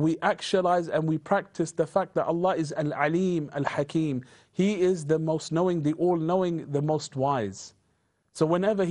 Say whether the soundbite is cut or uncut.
uncut